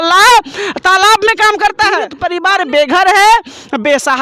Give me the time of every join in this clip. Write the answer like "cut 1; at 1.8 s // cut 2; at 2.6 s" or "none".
cut 1; at 2.2 s